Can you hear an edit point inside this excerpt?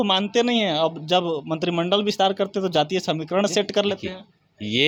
no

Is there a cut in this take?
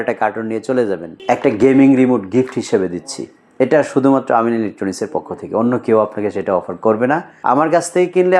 yes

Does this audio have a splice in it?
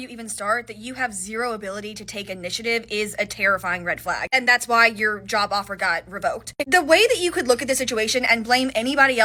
no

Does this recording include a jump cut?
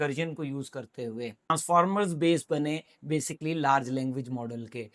yes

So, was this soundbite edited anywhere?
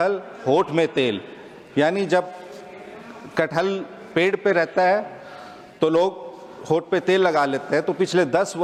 no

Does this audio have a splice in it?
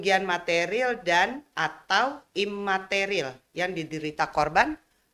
no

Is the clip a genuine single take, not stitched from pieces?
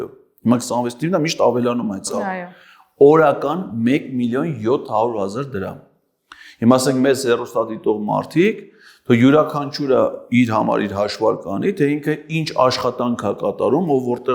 yes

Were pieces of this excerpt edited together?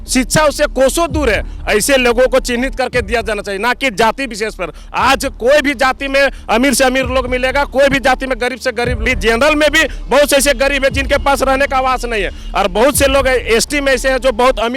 yes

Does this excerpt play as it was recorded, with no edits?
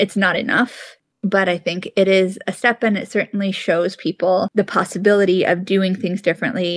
no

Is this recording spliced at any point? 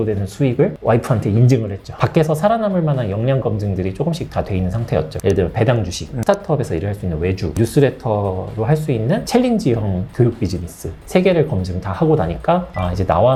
no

